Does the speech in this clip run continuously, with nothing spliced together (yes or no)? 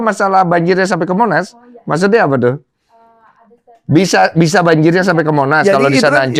yes